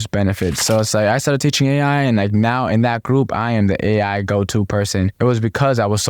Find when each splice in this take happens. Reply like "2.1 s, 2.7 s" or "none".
5.1 s